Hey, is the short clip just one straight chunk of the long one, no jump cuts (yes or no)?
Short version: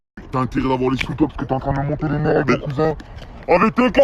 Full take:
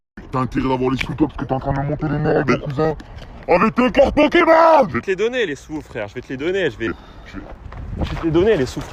yes